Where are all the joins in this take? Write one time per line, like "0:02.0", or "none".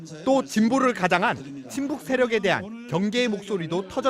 0:01.1